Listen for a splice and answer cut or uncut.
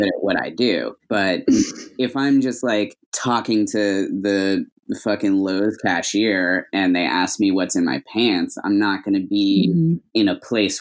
cut